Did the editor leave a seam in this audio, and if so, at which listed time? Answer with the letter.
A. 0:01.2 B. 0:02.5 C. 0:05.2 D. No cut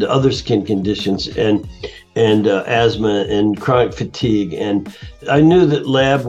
C